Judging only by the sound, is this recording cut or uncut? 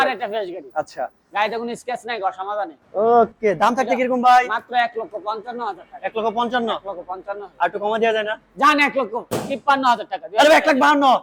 uncut